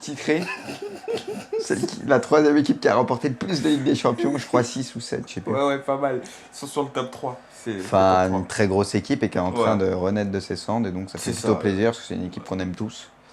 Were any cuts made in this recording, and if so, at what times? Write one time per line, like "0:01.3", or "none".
0:09.8